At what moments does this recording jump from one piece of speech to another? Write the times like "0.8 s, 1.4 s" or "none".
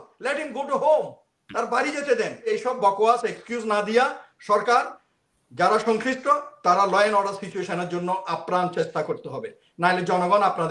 2.5 s